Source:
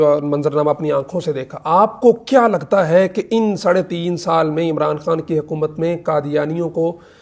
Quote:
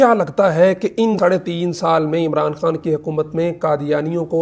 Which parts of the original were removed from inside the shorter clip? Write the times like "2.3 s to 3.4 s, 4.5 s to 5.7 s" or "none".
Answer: 3.5 s to 3.6 s